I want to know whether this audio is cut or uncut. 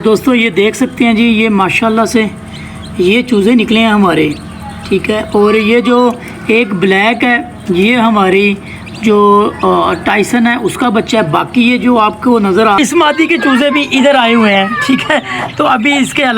cut